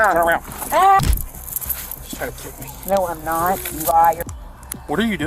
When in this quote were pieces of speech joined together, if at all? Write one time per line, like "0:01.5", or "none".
0:01.0
0:04.2